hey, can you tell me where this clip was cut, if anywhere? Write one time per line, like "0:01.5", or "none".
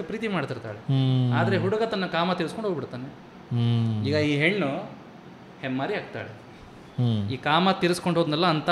none